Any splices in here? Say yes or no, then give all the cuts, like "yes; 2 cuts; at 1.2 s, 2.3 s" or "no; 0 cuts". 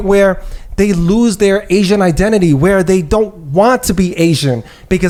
no; 0 cuts